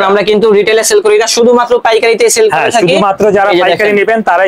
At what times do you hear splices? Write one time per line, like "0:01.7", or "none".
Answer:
none